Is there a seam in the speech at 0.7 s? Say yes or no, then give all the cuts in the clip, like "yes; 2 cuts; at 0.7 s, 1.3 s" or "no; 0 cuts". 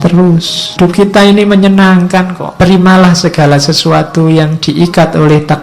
yes; 2 cuts; at 0.7 s, 2.4 s